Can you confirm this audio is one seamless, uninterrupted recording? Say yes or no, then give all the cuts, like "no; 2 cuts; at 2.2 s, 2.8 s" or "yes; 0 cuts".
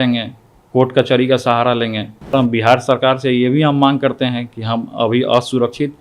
no; 1 cut; at 2.3 s